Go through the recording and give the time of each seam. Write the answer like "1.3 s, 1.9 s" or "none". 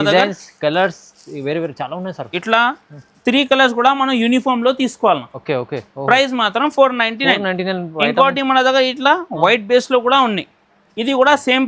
none